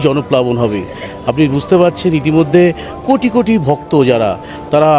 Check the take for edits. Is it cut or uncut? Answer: uncut